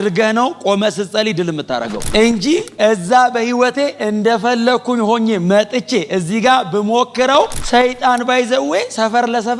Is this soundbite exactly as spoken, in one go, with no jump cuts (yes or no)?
yes